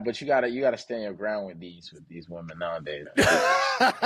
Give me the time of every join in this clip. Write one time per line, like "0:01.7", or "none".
0:03.1

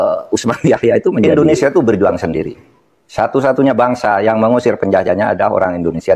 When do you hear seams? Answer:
0:01.3

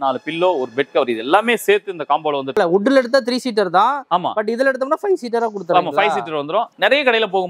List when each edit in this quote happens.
0:02.6
0:06.8

